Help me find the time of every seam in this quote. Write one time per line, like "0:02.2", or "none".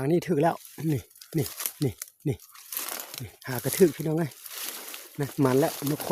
none